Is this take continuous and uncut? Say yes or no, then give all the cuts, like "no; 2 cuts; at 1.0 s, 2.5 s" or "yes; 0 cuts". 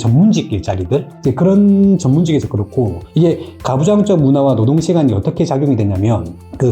no; 1 cut; at 1.1 s